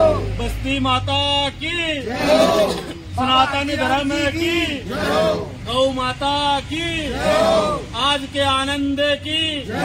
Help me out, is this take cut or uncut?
uncut